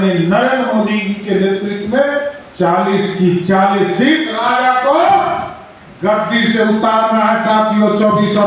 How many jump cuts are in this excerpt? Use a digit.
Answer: 1